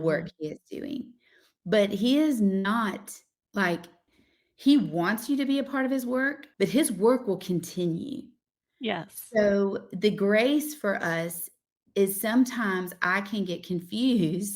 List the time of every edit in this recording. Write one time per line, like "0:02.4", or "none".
none